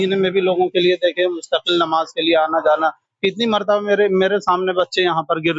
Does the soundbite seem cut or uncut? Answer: uncut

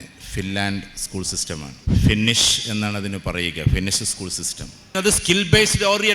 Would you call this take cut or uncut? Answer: cut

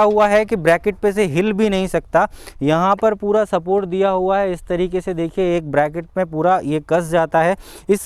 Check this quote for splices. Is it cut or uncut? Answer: uncut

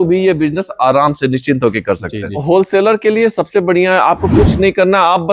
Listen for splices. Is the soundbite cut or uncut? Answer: cut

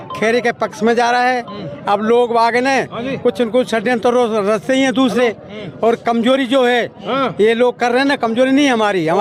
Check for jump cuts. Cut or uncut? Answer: uncut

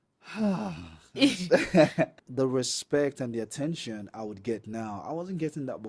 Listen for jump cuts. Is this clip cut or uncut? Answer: cut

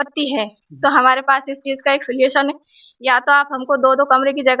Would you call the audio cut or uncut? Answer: uncut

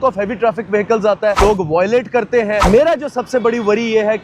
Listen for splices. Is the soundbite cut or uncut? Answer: cut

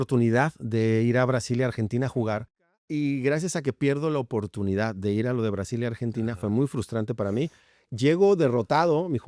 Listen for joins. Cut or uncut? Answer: cut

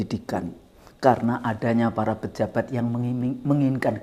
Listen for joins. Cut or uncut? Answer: uncut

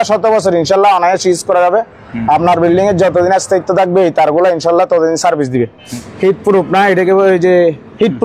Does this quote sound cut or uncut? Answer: cut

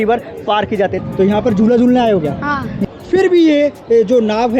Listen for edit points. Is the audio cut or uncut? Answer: cut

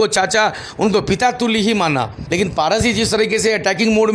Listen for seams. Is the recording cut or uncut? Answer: cut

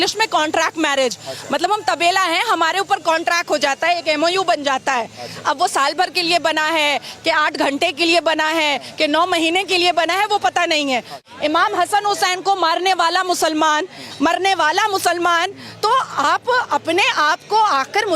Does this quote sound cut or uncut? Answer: cut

